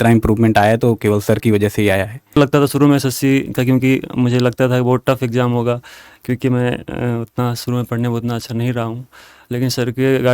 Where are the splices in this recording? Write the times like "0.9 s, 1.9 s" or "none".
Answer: 2.4 s